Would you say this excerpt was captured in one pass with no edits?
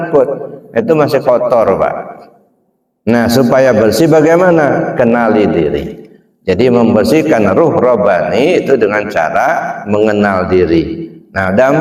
yes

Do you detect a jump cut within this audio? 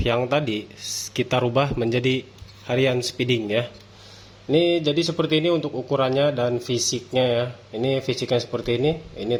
no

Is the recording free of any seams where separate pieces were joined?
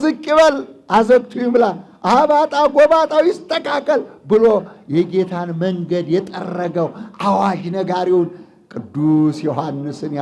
yes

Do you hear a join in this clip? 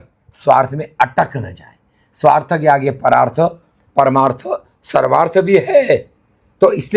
no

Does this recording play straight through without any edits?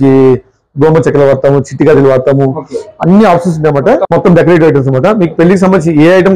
no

